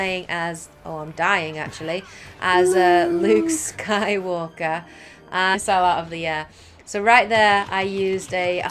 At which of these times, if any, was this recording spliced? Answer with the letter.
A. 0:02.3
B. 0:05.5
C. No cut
C